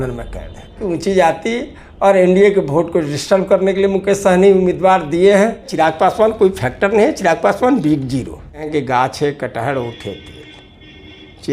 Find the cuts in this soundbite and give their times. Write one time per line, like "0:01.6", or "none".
0:00.8
0:05.7
0:08.7